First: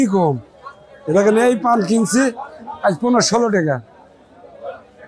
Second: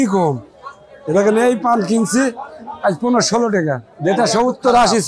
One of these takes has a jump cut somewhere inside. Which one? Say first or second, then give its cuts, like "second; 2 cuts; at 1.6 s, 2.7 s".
second; 1 cut; at 3.9 s